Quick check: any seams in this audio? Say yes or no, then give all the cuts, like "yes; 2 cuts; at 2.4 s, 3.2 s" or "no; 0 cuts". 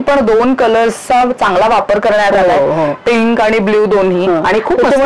no; 0 cuts